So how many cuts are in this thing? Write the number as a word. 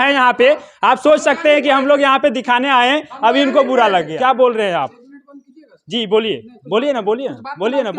one